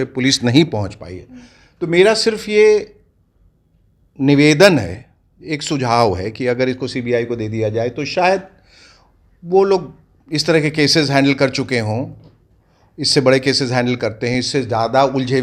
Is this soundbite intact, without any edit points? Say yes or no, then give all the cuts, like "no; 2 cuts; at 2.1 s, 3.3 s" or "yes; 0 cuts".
yes; 0 cuts